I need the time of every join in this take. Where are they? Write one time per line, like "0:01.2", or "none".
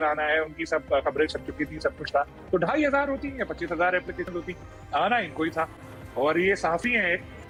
none

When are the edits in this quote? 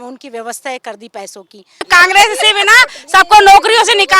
0:01.8

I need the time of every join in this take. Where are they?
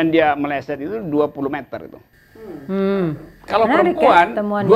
none

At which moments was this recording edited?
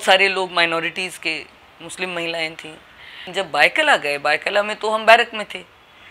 0:03.2

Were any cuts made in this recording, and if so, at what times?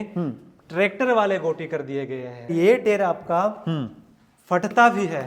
0:02.5

